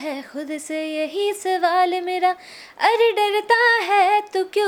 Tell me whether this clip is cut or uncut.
uncut